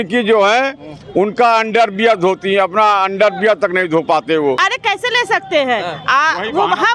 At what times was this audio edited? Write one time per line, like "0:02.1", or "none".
0:04.6